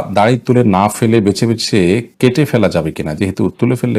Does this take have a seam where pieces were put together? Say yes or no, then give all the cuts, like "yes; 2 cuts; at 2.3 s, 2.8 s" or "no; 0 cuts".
no; 0 cuts